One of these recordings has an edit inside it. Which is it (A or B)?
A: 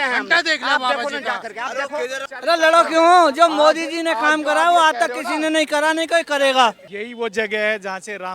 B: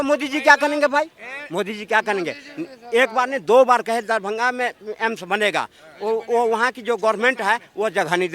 A